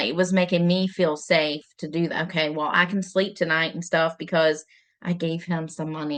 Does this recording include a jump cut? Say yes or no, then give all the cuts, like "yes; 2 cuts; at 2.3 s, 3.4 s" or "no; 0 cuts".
no; 0 cuts